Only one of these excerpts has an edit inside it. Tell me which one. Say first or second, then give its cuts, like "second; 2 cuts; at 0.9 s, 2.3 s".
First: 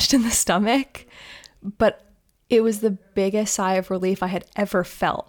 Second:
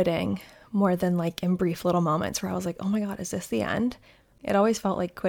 second; 1 cut; at 4.3 s